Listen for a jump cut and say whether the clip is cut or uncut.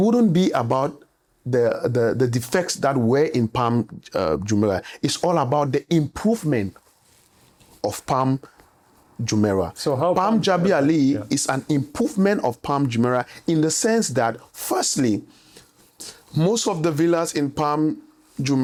uncut